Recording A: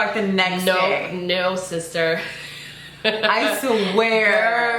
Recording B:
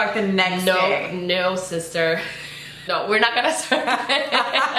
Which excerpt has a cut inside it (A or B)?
B